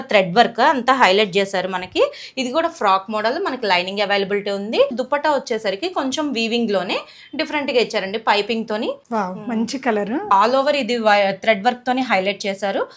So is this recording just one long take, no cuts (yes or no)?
no